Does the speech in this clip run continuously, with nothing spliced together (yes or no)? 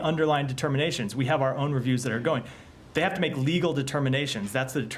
yes